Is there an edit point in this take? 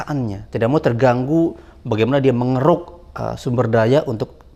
no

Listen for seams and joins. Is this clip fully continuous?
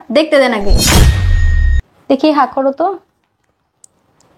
yes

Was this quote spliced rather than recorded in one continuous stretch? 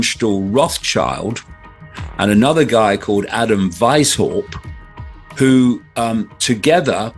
no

